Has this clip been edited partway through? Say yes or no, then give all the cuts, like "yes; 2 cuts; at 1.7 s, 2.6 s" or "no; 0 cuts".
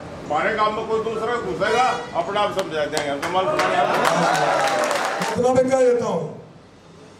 yes; 1 cut; at 5.3 s